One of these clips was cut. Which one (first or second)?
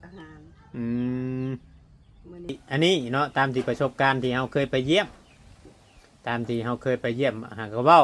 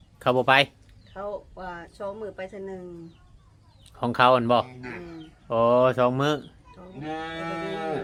first